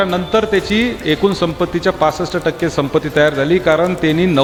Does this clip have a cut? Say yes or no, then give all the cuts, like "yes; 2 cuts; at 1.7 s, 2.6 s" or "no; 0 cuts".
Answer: no; 0 cuts